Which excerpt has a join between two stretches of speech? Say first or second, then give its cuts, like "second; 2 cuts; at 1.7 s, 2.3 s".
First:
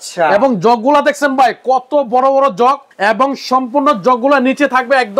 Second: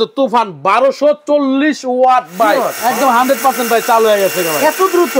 second; 1 cut; at 2.7 s